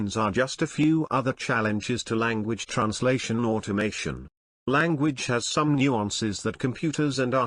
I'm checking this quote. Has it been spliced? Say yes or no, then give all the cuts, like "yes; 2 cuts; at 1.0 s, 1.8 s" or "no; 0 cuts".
no; 0 cuts